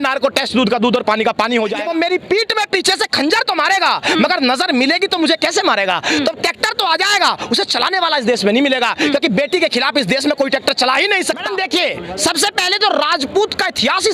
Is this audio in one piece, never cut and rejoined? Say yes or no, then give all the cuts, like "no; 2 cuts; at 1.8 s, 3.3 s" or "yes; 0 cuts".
no; 2 cuts; at 1.8 s, 11.5 s